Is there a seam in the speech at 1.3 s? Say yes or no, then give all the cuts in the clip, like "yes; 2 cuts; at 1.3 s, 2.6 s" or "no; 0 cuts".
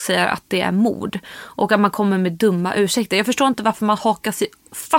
no; 0 cuts